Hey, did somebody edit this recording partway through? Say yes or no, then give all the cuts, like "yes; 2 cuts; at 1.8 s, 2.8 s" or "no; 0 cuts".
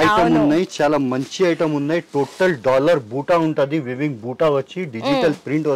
no; 0 cuts